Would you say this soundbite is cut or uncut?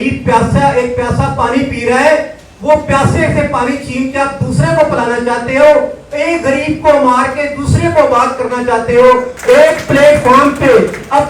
cut